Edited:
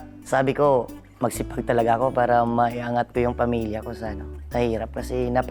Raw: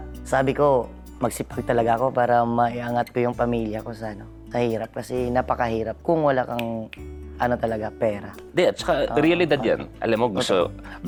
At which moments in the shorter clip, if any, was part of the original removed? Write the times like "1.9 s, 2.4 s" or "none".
none